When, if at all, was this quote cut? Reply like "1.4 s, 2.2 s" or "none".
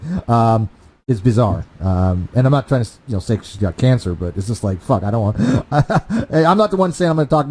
3.5 s